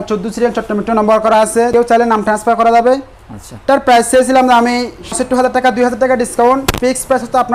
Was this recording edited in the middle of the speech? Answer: yes; 2 cuts; at 1.7 s, 5.1 s

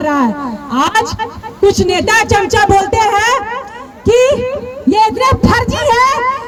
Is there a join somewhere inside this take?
no; 0 cuts

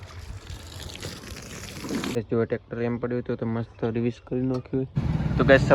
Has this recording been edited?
yes; 2 cuts; at 2.2 s, 4.9 s

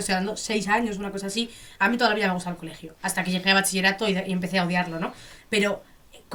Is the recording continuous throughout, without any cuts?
yes; 0 cuts

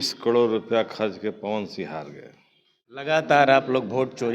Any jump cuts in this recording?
yes; 1 cut; at 3.0 s

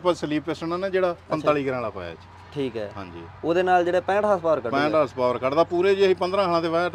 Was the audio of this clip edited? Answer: no; 0 cuts

